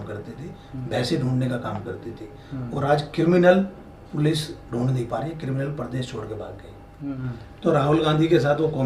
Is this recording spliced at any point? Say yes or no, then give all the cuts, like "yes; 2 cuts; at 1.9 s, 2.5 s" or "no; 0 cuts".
yes; 1 cut; at 7.2 s